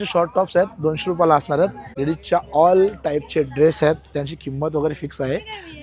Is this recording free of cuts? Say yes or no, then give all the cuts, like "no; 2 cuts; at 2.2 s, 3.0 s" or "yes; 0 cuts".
no; 1 cut; at 1.8 s